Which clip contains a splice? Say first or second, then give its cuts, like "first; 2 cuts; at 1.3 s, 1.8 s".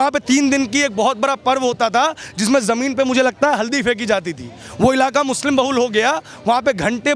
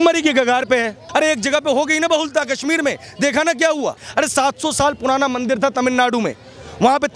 second; 2 cuts; at 1.0 s, 4.0 s